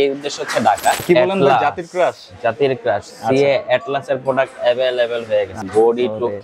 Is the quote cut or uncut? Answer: cut